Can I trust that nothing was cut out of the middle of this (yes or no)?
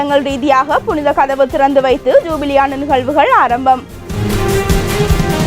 no